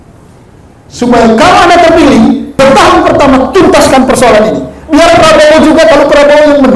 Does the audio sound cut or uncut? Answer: cut